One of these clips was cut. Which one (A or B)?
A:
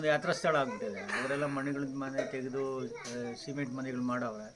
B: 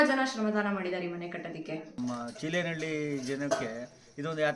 B